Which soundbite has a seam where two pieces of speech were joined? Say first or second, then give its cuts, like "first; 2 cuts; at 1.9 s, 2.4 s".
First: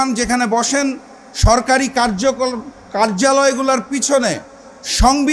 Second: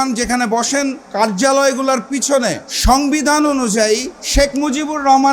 second; 3 cuts; at 1.0 s, 2.7 s, 4.2 s